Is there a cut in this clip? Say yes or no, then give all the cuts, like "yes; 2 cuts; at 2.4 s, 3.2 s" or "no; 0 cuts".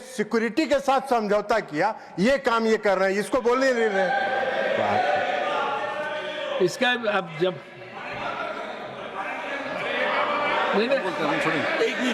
no; 0 cuts